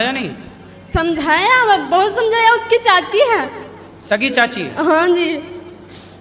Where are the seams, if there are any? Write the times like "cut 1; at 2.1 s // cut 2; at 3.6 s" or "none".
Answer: none